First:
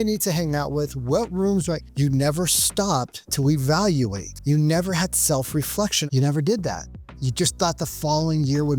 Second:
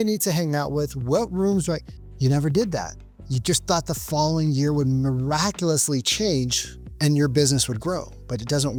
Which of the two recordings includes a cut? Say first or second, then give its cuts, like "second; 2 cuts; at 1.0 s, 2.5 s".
first; 3 cuts; at 1.9 s, 4.3 s, 6.0 s